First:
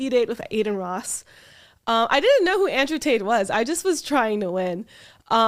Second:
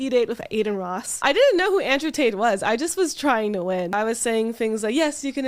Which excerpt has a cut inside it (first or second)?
second